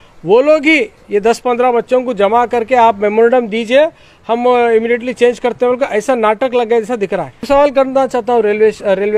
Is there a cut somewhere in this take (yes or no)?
yes